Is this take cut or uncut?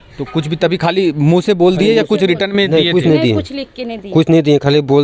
uncut